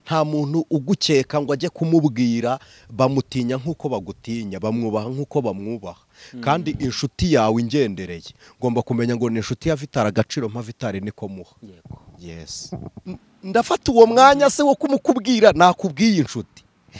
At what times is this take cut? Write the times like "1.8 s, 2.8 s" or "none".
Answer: 13.0 s